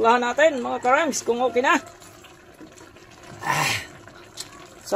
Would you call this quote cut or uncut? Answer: cut